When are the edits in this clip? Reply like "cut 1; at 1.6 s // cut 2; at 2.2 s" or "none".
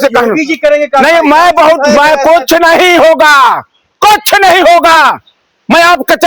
none